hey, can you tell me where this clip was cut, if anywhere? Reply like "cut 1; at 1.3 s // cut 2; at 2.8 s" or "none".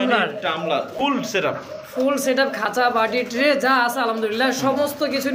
cut 1; at 0.9 s

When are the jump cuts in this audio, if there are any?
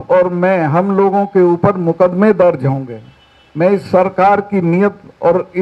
none

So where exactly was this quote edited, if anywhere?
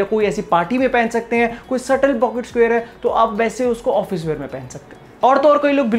none

